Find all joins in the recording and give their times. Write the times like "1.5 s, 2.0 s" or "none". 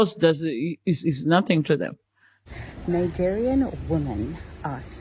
2.3 s